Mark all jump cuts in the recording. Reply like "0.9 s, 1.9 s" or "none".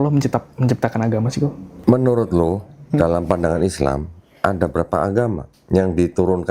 1.7 s, 5.5 s